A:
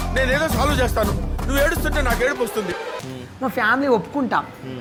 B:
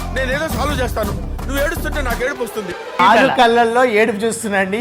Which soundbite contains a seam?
B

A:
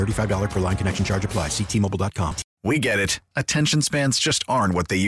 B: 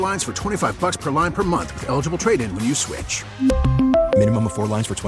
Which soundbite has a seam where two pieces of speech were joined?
A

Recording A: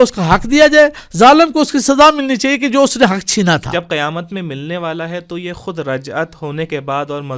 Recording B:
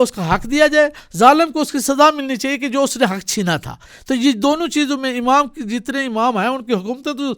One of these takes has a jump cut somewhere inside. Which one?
A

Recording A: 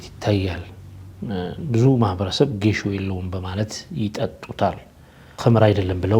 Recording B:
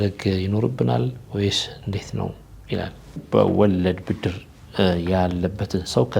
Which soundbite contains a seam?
B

